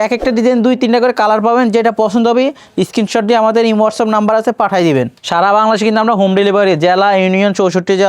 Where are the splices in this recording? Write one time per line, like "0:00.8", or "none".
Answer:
0:05.2